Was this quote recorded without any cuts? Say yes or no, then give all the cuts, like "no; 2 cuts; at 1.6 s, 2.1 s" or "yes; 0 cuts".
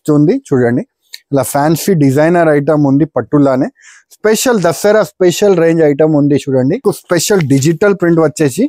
no; 1 cut; at 6.8 s